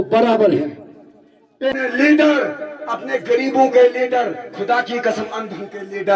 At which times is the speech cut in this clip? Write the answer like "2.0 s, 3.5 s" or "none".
1.7 s